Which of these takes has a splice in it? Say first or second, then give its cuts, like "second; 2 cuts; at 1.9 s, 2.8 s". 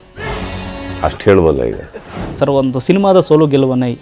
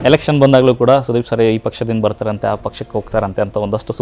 first; 1 cut; at 1.7 s